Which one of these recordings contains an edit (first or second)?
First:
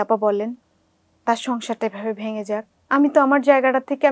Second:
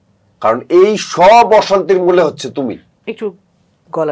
first